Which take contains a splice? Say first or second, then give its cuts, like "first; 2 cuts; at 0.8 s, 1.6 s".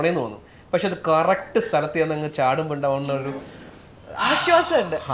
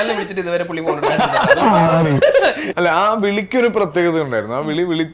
second; 1 cut; at 2.7 s